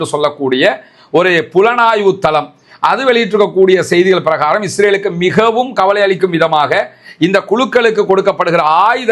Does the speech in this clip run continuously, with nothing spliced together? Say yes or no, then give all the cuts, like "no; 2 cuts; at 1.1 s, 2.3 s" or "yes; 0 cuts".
yes; 0 cuts